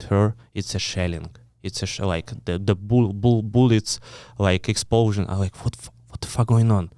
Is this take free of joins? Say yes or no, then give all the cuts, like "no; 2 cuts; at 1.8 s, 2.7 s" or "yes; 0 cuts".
yes; 0 cuts